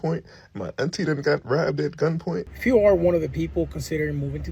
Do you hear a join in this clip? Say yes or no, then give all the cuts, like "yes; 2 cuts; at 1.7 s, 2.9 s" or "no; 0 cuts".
yes; 1 cut; at 2.5 s